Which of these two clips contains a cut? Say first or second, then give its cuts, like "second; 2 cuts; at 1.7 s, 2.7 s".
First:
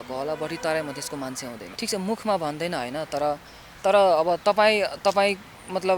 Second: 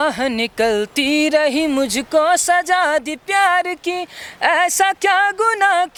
first; 1 cut; at 1.6 s